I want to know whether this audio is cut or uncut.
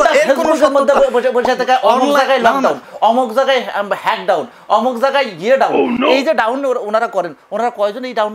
uncut